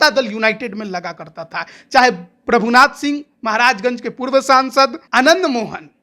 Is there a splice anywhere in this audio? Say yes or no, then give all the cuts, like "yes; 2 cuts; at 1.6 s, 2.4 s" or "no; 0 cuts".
yes; 1 cut; at 5.0 s